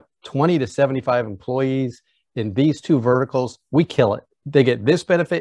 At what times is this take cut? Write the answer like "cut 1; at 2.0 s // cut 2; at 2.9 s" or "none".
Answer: cut 1; at 4.3 s